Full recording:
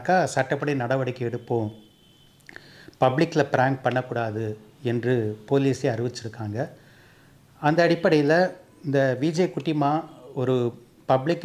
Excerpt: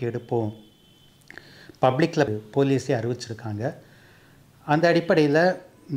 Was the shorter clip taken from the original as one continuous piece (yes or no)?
no